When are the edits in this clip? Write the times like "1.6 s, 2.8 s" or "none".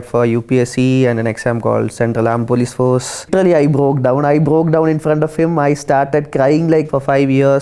3.3 s, 6.9 s